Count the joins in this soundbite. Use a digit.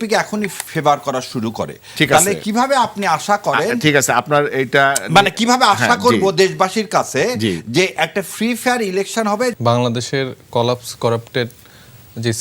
0